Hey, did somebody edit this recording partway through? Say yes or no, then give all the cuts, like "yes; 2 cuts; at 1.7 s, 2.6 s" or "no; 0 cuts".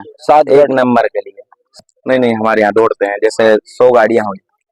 yes; 1 cut; at 1.8 s